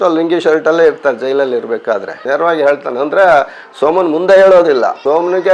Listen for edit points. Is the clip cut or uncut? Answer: cut